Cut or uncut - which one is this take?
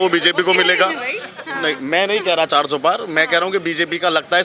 uncut